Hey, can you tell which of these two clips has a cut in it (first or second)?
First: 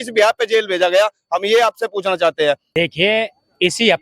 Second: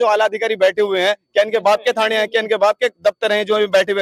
first